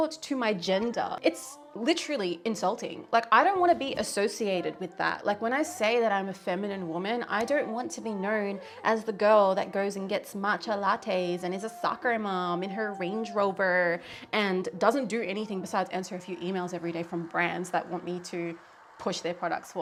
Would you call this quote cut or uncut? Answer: uncut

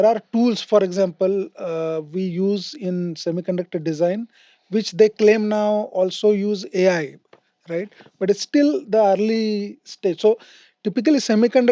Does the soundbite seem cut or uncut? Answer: uncut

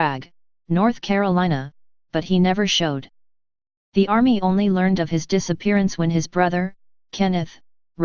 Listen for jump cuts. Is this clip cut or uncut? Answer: uncut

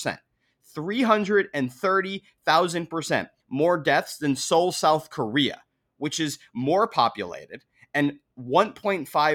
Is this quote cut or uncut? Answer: uncut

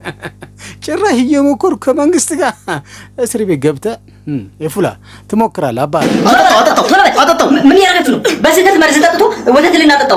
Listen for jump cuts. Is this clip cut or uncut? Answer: uncut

